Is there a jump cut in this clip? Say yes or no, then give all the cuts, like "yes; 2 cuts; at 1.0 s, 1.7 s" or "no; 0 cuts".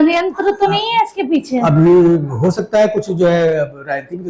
no; 0 cuts